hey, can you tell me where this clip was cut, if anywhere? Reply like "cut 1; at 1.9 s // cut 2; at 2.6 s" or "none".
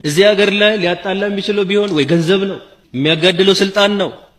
none